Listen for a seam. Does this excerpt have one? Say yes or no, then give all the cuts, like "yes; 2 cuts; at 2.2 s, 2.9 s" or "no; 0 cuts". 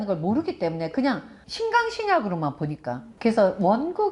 yes; 1 cut; at 3.0 s